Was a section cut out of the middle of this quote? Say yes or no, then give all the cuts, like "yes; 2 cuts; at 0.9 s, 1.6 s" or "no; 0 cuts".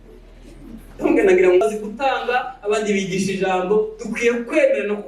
yes; 1 cut; at 1.6 s